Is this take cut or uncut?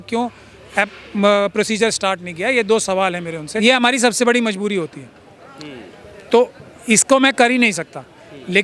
cut